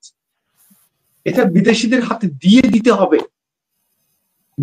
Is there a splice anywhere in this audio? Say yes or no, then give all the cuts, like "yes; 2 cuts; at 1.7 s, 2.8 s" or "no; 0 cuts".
no; 0 cuts